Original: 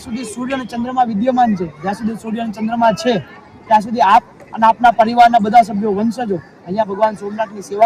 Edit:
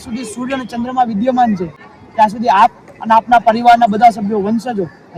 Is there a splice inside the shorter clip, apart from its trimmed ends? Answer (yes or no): yes